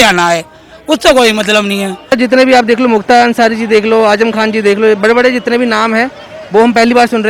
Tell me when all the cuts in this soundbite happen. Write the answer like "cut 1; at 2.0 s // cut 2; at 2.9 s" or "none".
cut 1; at 2.1 s